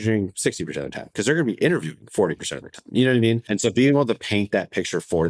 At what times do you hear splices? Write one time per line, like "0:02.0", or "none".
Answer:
0:03.4